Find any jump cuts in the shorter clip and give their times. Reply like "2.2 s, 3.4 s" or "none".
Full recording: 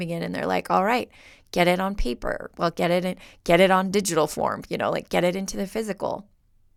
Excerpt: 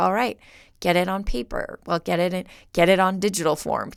none